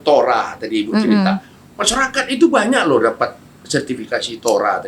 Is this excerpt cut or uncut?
uncut